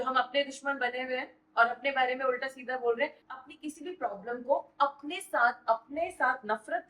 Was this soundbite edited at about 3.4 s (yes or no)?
yes